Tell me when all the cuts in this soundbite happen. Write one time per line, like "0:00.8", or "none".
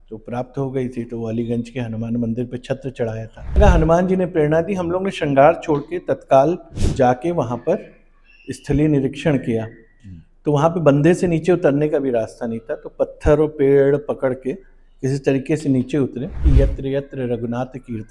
0:03.6
0:16.4